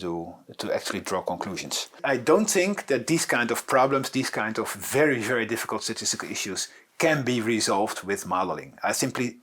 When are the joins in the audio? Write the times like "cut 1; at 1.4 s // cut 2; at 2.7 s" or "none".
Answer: cut 1; at 2.0 s